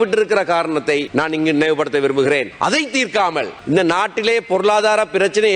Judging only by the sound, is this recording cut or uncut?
cut